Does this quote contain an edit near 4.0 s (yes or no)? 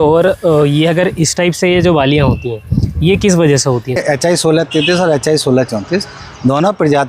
yes